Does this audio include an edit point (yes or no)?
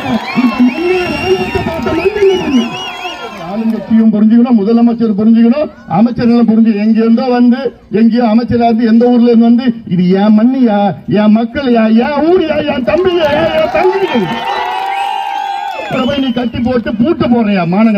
yes